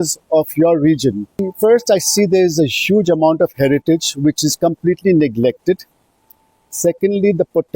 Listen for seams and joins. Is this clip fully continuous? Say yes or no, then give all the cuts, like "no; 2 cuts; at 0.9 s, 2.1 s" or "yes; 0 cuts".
no; 1 cut; at 1.5 s